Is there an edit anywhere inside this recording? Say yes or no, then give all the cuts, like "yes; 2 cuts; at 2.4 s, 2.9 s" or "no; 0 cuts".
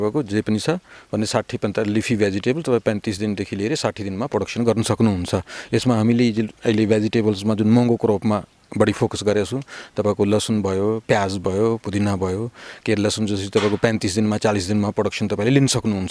no; 0 cuts